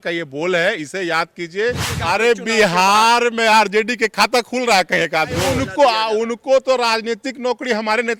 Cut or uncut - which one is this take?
cut